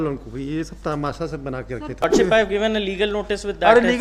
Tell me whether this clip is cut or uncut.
cut